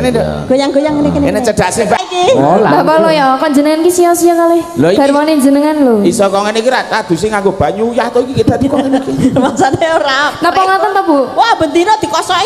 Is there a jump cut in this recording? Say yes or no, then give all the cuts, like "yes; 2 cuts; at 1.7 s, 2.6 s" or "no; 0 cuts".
yes; 1 cut; at 2.0 s